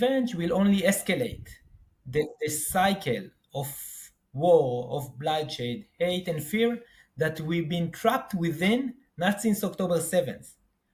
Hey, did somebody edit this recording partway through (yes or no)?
no